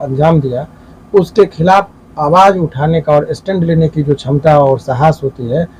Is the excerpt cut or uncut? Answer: uncut